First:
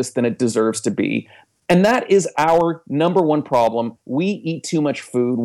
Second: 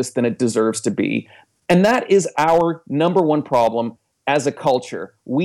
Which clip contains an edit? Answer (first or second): first